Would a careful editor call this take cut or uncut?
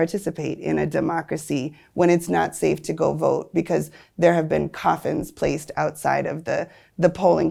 uncut